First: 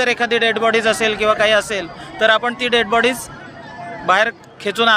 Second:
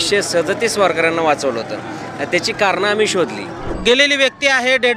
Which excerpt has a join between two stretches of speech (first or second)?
second